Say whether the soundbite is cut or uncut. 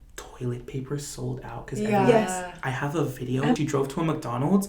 cut